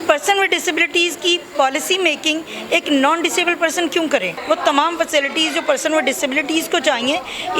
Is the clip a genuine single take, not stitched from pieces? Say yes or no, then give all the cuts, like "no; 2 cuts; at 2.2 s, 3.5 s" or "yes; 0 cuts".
no; 1 cut; at 4.3 s